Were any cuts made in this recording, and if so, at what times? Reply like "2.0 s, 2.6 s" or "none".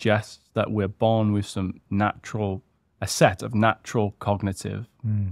none